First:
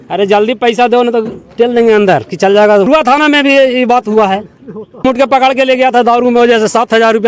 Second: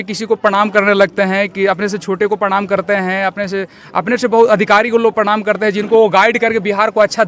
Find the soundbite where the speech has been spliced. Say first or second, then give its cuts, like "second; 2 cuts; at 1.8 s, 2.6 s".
first; 2 cuts; at 2.9 s, 5.0 s